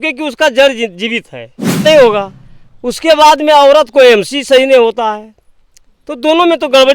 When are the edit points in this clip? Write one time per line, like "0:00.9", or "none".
0:01.8